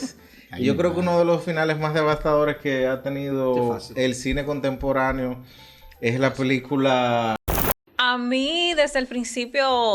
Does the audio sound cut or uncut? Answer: cut